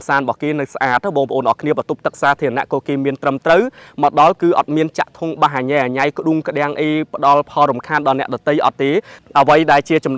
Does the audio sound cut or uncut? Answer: cut